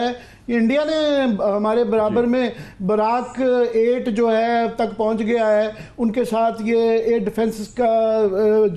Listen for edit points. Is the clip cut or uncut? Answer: uncut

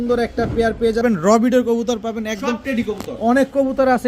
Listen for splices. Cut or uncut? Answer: cut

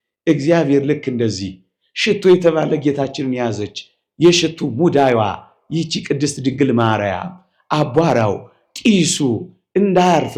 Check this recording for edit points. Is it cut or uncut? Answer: uncut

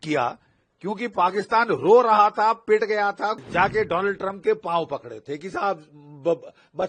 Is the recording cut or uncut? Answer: cut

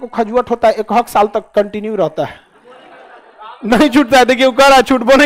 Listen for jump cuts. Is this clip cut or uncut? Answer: uncut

